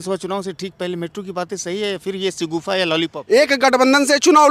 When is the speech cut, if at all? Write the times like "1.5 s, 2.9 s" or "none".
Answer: 3.1 s